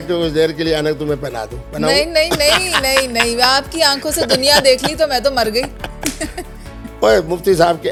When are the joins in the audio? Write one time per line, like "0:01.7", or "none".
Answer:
none